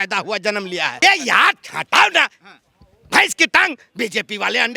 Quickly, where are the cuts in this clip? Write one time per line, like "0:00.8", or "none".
0:01.0